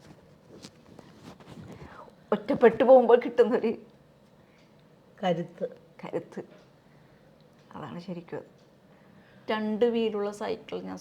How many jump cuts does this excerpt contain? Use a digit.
1